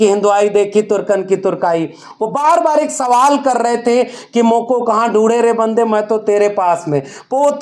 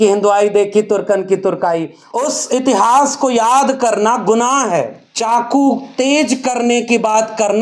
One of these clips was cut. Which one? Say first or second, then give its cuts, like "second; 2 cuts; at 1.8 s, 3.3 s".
second; 2 cuts; at 2.0 s, 5.0 s